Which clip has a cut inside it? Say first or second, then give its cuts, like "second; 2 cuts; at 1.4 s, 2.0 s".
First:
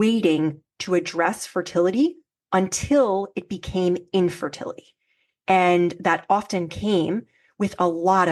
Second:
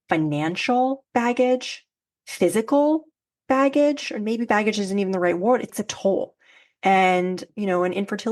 second; 3 cuts; at 1.0 s, 5.7 s, 7.4 s